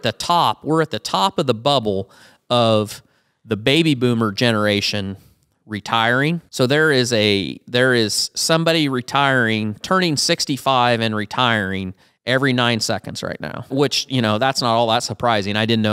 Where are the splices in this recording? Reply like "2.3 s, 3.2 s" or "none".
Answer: 6.5 s, 13.7 s

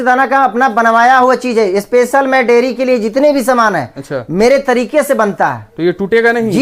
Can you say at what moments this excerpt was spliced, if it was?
none

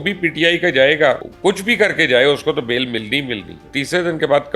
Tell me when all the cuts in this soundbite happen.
1.3 s, 3.6 s

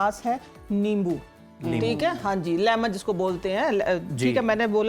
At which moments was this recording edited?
none

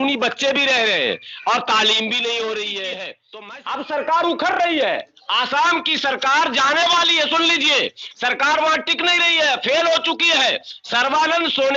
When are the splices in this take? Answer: 3.3 s

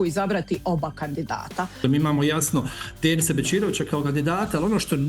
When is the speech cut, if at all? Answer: 1.8 s

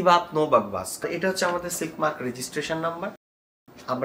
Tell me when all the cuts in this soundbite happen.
1.0 s

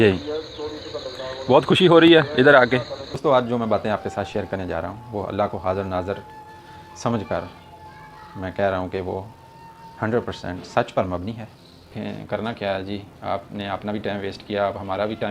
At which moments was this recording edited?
3.2 s, 11.9 s

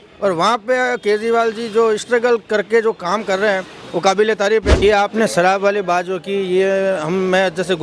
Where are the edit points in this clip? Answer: 4.8 s

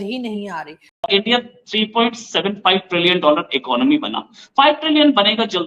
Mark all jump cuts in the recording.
1.1 s

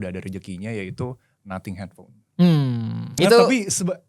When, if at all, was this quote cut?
3.2 s

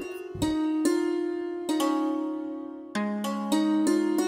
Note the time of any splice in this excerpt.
none

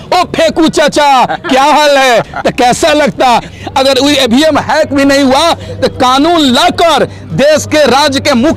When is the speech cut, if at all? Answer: 3.5 s

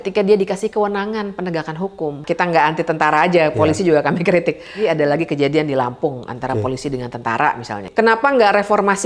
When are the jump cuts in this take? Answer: 2.2 s, 4.8 s, 7.8 s

